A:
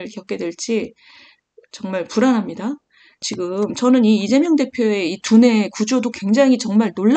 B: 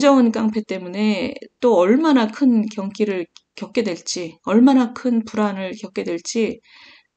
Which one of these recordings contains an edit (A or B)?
A